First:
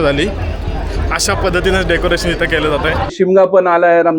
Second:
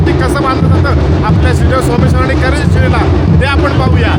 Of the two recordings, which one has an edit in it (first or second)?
first